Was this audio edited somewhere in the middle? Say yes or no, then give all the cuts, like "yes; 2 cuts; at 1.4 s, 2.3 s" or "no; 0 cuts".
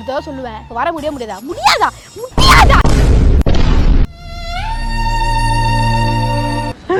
no; 0 cuts